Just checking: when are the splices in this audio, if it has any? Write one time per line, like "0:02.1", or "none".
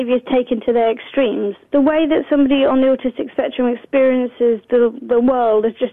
0:01.6